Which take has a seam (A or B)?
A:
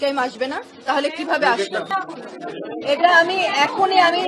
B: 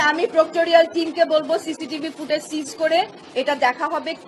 A